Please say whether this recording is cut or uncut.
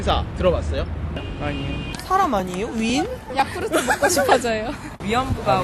cut